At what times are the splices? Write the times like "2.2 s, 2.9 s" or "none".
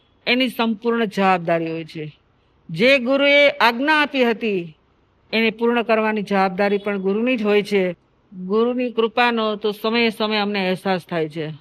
8.1 s